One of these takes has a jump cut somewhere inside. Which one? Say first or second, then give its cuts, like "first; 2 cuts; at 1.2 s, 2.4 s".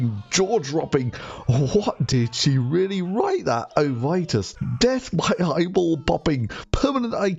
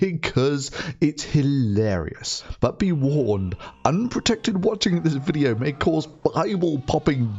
first; 1 cut; at 1.6 s